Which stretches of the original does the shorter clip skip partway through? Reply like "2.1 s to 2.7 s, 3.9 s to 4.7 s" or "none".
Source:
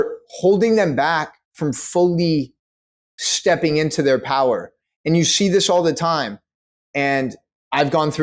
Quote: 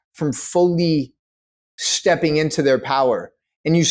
none